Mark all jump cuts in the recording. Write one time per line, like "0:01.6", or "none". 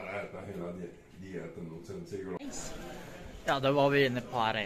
0:02.4